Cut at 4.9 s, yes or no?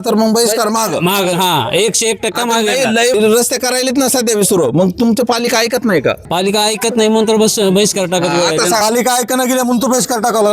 no